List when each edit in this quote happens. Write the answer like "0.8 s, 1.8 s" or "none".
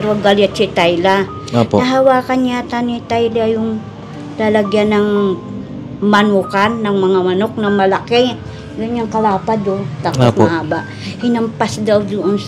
none